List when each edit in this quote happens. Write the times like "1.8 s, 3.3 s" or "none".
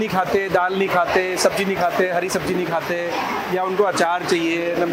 none